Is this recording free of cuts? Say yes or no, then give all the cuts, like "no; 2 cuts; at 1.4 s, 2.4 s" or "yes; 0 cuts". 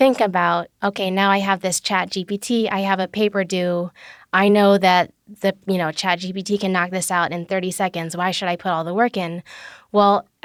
yes; 0 cuts